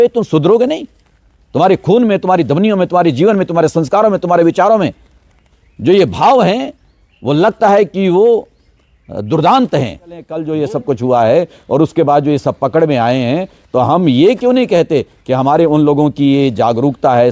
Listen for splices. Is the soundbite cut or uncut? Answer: cut